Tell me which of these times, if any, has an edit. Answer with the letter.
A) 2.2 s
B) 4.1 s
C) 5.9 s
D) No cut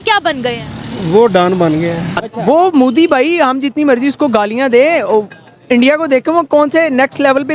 A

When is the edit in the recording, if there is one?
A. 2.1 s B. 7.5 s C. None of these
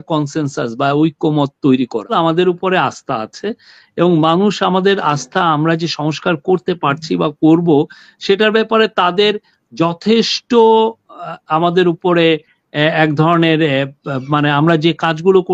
A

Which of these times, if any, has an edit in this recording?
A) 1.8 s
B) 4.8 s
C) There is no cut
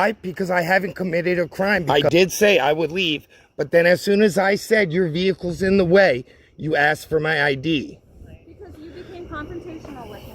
A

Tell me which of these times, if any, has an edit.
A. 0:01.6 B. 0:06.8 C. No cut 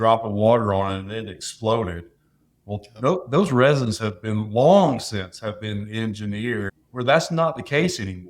B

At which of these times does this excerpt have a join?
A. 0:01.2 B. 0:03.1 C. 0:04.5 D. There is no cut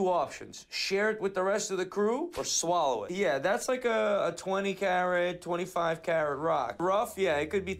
B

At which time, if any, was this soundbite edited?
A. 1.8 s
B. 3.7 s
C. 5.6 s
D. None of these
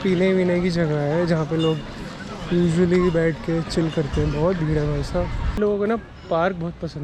C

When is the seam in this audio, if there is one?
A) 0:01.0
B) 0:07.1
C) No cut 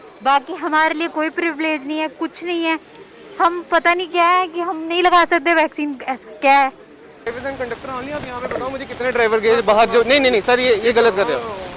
B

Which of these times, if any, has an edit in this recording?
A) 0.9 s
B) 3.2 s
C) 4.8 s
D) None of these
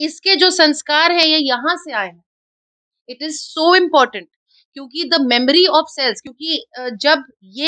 D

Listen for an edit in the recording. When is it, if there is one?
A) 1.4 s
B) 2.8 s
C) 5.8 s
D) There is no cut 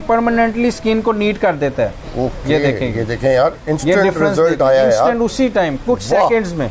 D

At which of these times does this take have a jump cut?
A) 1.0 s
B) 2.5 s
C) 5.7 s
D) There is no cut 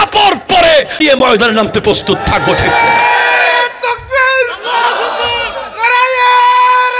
A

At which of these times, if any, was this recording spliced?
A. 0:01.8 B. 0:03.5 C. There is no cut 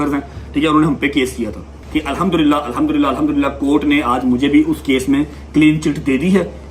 A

